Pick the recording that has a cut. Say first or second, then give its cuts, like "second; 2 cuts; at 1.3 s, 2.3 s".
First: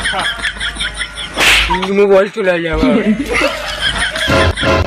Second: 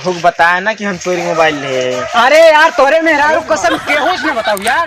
first; 1 cut; at 1.7 s